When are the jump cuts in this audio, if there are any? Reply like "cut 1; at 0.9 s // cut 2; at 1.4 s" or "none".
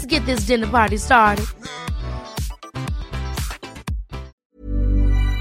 cut 1; at 4.3 s